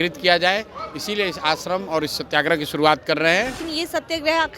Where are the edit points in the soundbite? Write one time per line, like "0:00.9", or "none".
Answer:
0:03.6